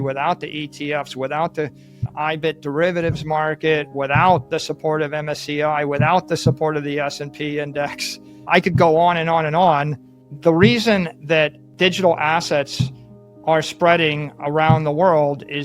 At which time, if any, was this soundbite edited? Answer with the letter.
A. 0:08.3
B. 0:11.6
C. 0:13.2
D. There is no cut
B